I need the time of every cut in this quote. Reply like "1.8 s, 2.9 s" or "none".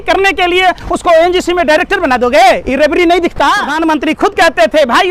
3.7 s